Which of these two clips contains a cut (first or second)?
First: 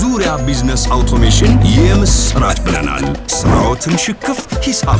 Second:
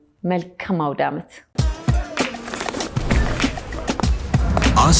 second